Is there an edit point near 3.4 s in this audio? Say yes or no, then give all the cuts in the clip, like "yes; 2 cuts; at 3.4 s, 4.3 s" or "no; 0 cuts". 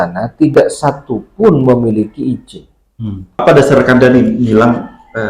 yes; 1 cut; at 3.4 s